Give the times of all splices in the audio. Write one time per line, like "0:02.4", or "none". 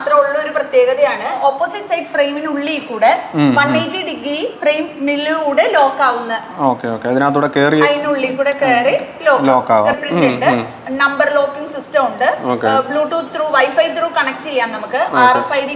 0:01.4
0:04.5
0:09.9